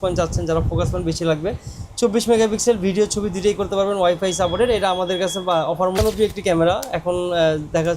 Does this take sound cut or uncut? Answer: cut